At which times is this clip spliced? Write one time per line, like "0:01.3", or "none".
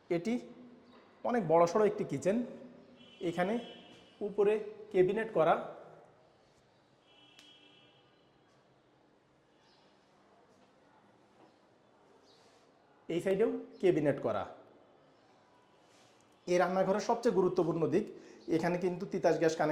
none